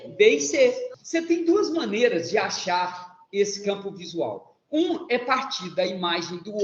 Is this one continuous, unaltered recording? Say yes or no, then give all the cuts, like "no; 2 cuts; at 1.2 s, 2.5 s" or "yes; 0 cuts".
no; 1 cut; at 0.9 s